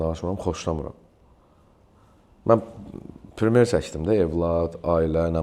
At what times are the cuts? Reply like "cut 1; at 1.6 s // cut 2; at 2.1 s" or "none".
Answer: none